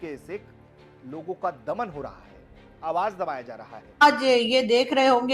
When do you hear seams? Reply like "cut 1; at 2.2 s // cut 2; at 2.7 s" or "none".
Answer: cut 1; at 4.0 s